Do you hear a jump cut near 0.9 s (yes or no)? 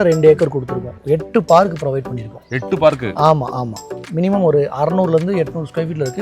no